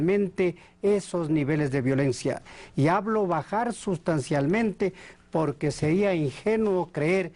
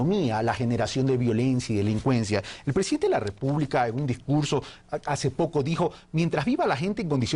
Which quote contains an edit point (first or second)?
second